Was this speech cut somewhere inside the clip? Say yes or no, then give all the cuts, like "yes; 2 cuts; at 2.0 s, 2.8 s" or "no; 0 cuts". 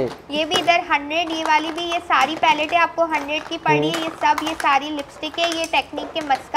no; 0 cuts